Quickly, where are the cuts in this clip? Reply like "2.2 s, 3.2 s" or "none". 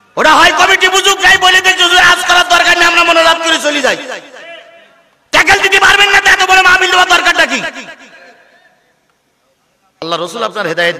10.0 s